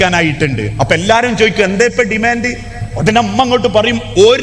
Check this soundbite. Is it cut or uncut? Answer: uncut